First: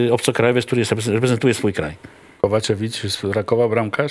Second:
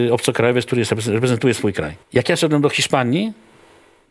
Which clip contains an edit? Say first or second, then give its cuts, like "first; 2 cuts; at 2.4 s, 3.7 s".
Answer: second; 1 cut; at 1.9 s